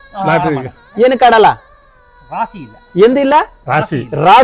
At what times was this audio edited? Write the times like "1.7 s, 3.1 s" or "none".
none